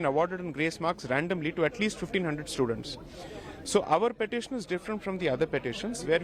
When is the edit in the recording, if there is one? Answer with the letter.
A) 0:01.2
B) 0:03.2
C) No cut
C